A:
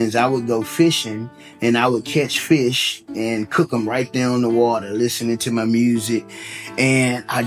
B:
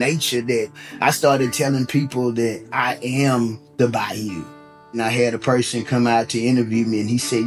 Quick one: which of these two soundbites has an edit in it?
B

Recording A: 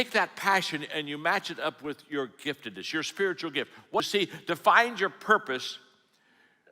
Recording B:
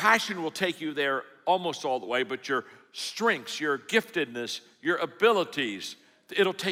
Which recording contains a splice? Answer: A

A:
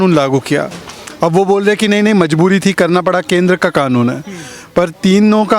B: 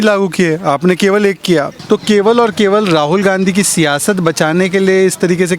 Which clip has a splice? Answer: B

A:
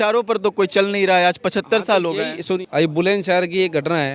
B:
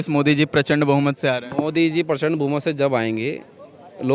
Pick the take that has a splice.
A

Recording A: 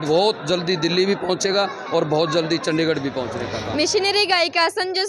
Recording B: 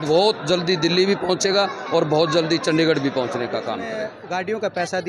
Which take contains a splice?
B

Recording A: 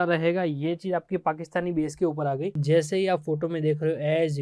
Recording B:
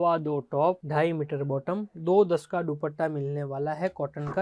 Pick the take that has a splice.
A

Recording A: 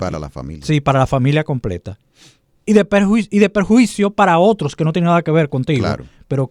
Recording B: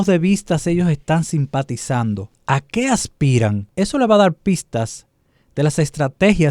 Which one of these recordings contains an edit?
B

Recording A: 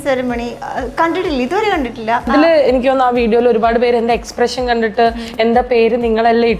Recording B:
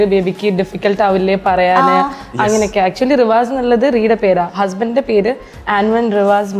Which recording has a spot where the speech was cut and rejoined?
A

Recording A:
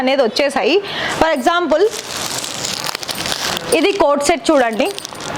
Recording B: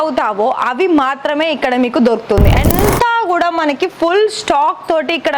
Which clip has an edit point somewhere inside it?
B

